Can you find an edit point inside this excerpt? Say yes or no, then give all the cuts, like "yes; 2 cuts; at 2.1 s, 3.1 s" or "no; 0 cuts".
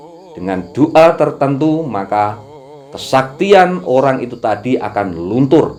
no; 0 cuts